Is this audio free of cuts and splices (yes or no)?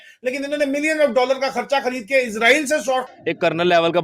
no